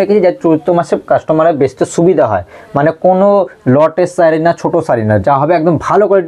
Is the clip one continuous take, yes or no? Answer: yes